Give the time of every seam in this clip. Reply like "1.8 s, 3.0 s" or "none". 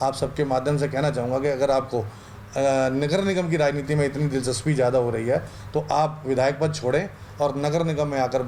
none